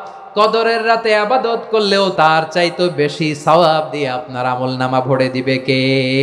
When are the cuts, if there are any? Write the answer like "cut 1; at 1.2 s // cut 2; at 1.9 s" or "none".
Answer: cut 1; at 2.1 s

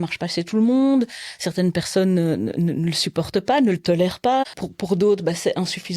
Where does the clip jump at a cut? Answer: cut 1; at 4.4 s

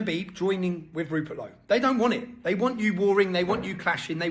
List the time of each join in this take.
none

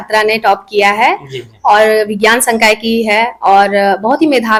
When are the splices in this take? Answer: none

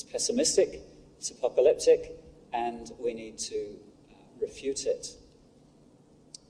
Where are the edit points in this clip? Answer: cut 1; at 5.3 s

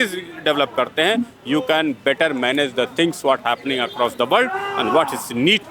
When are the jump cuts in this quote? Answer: none

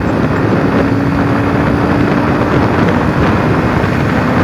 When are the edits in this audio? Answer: none

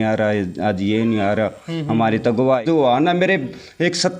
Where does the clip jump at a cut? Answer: cut 1; at 2.6 s

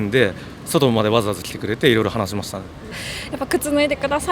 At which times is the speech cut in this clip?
cut 1; at 3.0 s

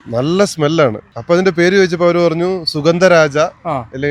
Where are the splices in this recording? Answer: cut 1; at 1.1 s

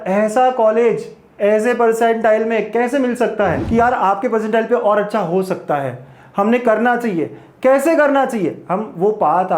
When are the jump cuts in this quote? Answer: cut 1; at 3.6 s

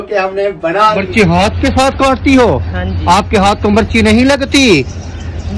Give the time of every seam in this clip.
cut 1; at 1.0 s

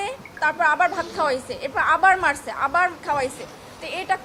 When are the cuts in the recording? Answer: none

